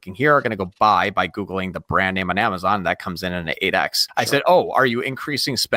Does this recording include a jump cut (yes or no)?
yes